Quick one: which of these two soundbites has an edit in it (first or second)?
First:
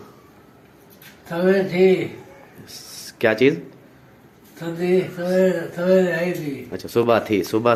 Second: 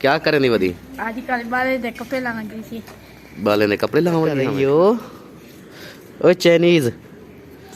second